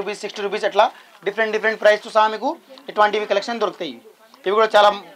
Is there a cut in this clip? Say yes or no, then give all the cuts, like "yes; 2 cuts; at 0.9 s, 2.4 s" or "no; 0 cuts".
no; 0 cuts